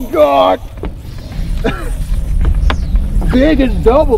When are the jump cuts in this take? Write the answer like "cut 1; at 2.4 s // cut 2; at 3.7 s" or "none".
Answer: none

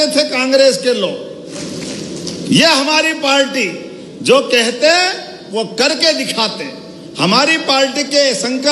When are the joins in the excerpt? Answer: none

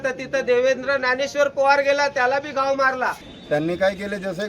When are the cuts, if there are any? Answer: cut 1; at 3.3 s

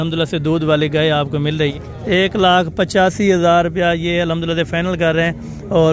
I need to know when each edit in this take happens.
cut 1; at 1.7 s

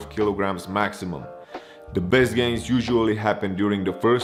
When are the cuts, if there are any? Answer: none

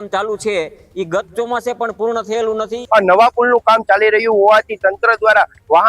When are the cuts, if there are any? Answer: cut 1; at 2.7 s

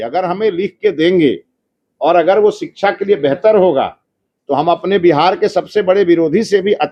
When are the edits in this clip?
none

